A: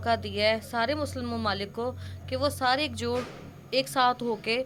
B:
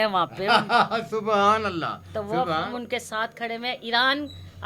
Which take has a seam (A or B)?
B